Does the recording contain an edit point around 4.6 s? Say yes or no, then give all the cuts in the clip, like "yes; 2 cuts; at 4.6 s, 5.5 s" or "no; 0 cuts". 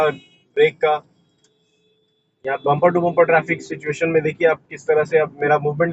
no; 0 cuts